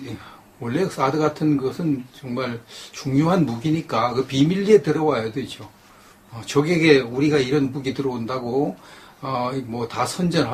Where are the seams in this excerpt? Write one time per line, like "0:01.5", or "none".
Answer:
0:08.9